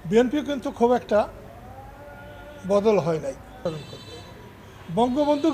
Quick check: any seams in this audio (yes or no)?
yes